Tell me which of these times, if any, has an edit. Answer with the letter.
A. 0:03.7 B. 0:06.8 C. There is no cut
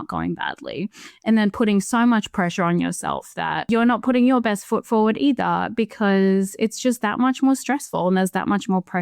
A